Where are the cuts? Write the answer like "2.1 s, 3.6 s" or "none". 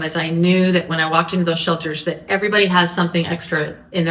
none